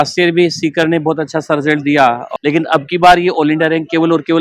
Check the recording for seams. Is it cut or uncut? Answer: cut